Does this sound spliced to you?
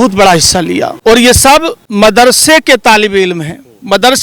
yes; 2 cuts; at 0.9 s, 1.8 s

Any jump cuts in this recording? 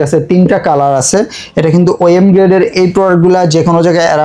no; 0 cuts

